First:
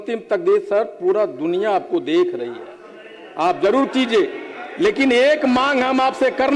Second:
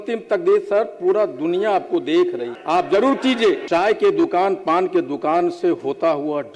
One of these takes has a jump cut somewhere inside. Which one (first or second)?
second